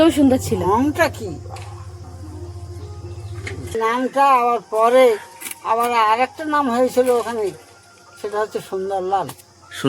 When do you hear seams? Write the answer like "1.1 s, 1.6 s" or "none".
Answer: 3.7 s